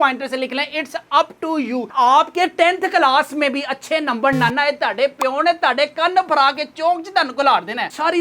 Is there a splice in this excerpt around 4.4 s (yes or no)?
no